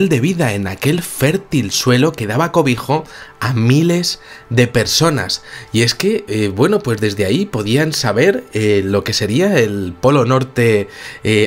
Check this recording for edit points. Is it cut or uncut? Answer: uncut